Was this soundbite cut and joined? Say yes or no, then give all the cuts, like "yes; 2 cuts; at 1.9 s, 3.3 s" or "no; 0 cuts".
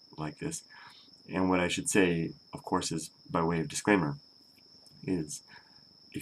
no; 0 cuts